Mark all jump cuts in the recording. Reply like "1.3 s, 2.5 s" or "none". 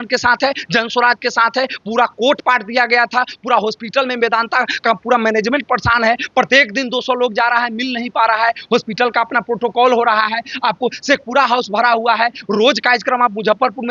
none